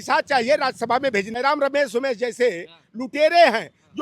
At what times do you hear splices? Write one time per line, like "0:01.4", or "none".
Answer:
0:01.3